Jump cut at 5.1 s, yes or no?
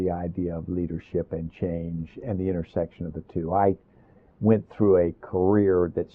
no